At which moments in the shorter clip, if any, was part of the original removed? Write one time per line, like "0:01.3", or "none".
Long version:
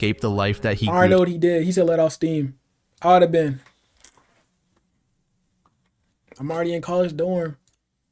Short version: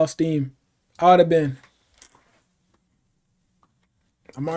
none

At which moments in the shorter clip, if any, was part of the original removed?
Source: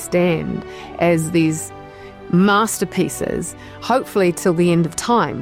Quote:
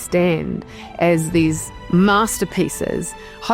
0:01.7

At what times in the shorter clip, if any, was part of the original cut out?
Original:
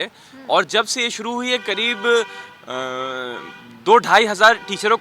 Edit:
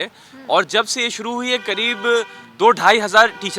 0:02.4

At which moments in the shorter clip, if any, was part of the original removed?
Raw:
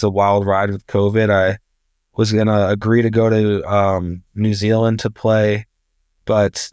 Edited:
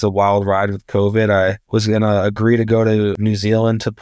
0:01.6
0:03.2

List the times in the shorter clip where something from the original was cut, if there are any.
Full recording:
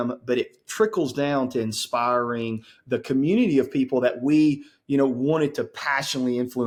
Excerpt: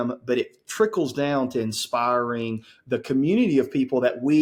none

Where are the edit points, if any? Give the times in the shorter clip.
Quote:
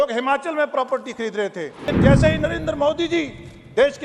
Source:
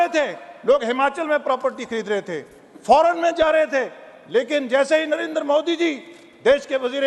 0:01.9

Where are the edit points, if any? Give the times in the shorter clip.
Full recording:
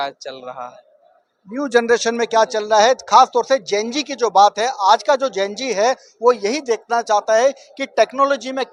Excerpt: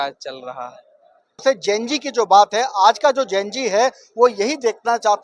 0:01.4

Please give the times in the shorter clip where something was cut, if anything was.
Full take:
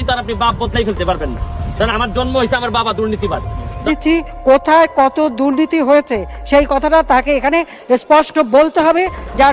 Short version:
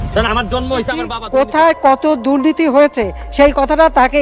0:01.2

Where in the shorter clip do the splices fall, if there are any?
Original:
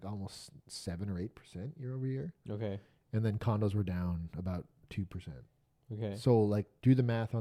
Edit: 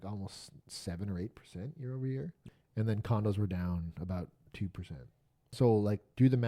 0:02.4
0:05.5

